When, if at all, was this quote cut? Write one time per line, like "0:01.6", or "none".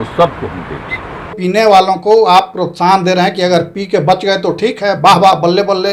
0:01.4